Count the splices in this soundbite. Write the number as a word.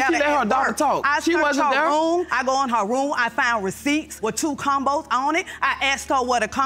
zero